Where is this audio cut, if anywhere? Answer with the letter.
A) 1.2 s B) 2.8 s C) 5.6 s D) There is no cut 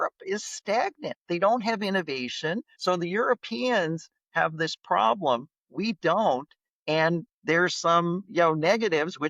B